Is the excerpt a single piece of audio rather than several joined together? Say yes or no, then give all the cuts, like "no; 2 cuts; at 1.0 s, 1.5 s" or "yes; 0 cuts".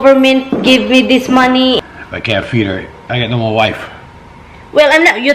no; 1 cut; at 1.8 s